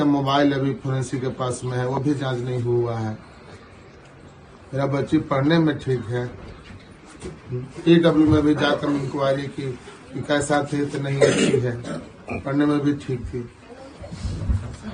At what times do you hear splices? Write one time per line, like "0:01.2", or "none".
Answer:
none